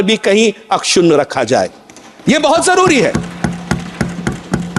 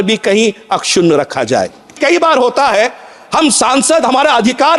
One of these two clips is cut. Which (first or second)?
second